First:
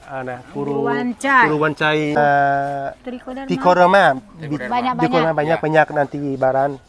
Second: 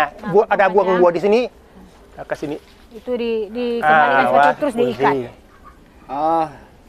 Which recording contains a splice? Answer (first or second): first